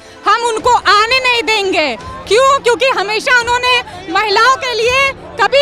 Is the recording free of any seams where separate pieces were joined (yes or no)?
yes